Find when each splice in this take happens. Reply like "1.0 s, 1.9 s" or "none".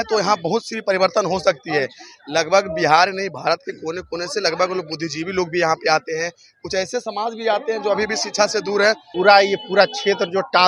9.1 s